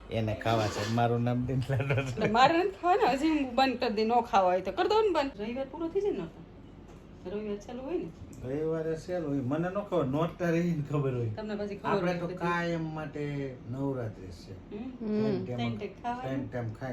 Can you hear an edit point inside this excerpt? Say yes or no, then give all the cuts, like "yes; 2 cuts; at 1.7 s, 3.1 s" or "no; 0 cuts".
yes; 1 cut; at 5.4 s